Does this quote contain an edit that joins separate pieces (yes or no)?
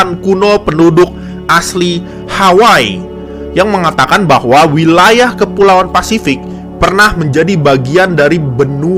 no